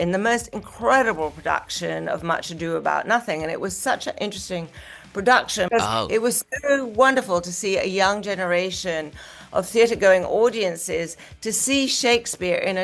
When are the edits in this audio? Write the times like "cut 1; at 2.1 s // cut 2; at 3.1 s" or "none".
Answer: cut 1; at 5.7 s